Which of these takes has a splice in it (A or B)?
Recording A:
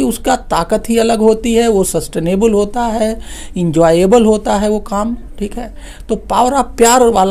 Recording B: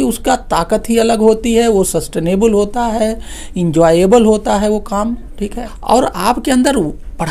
B